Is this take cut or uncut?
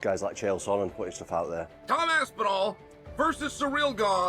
uncut